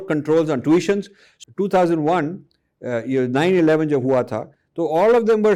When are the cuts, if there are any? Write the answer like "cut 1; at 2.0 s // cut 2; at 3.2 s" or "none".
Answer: cut 1; at 1.2 s